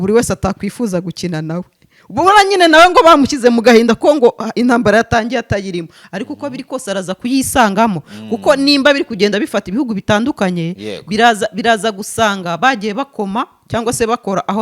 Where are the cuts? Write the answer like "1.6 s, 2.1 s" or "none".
none

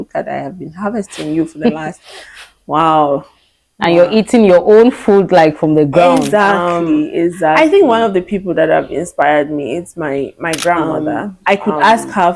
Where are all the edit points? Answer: 7.6 s, 10.8 s

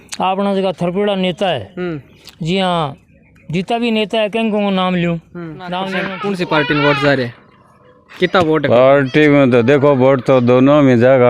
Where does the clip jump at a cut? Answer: 6.1 s

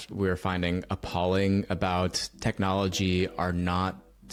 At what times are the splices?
none

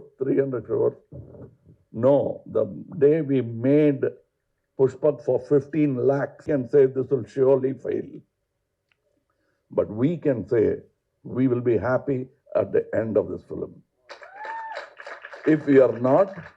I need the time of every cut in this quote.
6.5 s

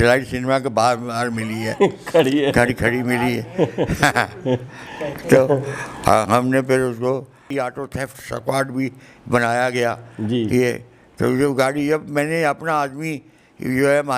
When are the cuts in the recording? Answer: 7.4 s

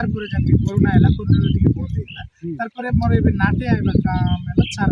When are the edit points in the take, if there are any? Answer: none

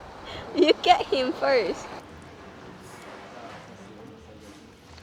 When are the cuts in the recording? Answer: 2.0 s

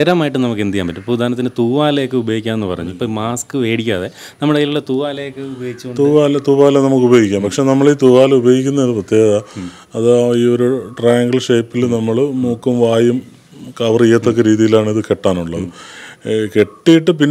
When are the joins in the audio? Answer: none

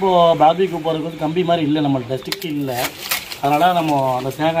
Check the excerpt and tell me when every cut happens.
none

